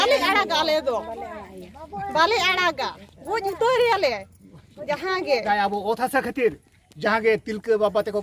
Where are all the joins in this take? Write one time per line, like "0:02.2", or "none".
0:05.4